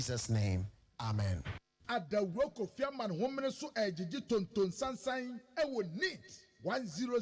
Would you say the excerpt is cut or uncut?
cut